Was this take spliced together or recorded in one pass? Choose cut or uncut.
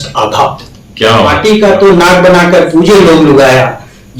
cut